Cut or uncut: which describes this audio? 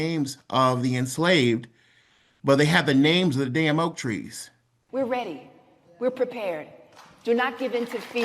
cut